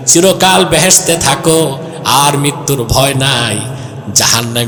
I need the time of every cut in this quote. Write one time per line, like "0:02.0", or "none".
none